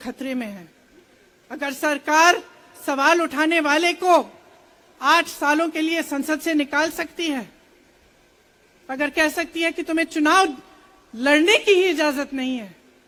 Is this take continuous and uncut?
yes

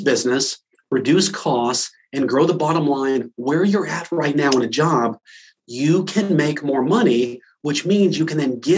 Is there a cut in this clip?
no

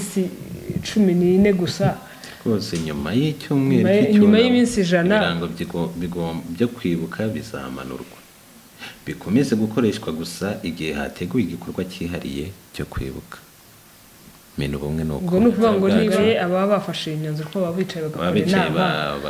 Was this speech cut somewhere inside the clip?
yes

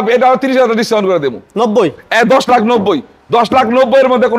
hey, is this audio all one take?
yes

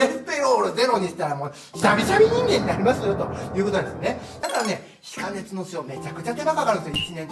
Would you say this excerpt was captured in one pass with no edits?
no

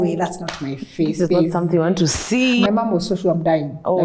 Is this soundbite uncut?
no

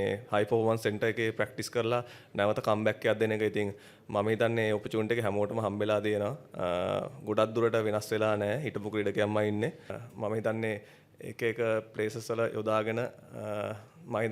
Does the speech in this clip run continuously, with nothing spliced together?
no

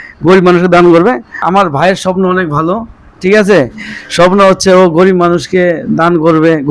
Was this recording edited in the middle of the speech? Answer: yes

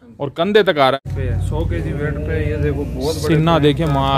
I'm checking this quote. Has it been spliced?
yes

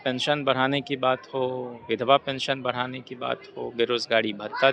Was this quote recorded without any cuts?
yes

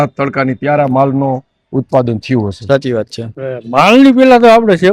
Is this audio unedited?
no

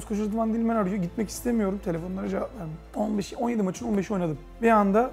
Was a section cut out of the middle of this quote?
no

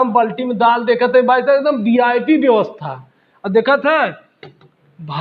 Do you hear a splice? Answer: no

